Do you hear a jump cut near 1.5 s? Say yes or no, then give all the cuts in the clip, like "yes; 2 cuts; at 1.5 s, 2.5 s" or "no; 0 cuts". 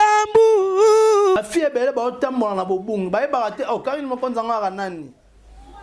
yes; 1 cut; at 1.5 s